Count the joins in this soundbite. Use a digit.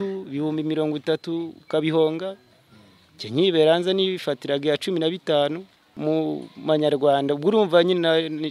1